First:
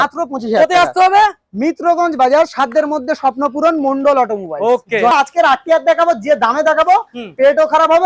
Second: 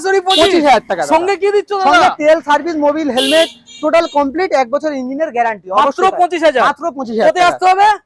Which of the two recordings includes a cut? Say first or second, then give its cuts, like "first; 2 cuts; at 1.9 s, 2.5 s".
first; 1 cut; at 5.1 s